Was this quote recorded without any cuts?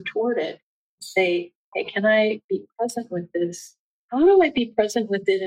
no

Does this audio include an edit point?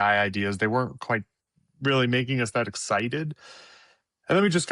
no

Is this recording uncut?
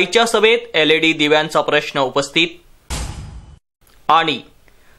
yes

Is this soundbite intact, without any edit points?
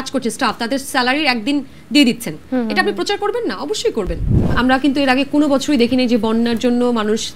no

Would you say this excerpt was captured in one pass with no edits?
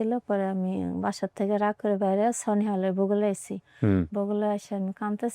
yes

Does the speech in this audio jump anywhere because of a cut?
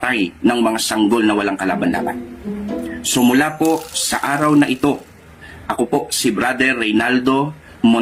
no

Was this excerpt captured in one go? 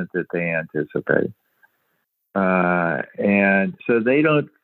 yes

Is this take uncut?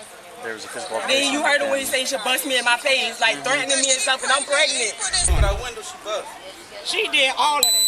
no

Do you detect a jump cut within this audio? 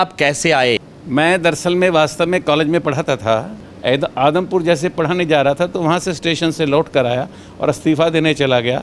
yes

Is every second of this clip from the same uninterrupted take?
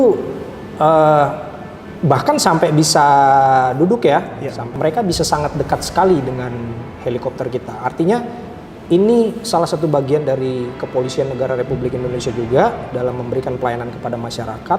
no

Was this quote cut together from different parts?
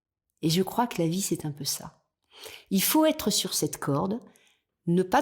no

